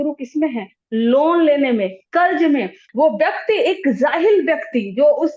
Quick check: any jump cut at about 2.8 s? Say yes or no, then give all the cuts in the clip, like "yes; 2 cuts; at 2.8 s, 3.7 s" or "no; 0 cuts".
yes; 1 cut; at 2.8 s